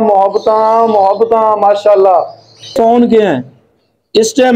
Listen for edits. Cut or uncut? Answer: cut